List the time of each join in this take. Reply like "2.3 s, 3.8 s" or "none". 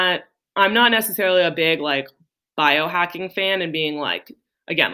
none